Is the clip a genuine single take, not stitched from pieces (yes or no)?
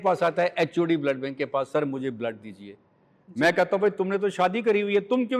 yes